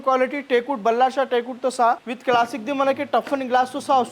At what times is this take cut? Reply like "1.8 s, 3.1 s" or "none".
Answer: 2.1 s